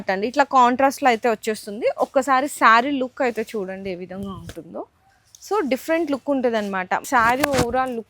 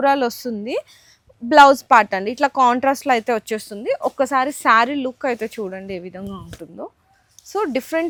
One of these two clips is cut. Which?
first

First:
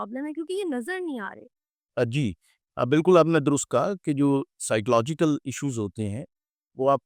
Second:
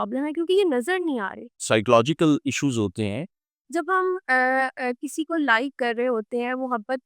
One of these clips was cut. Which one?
second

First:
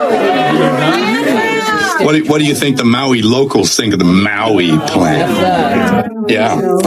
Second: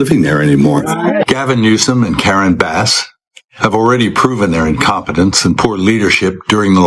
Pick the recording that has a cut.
second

